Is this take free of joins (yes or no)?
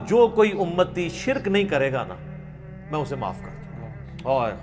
yes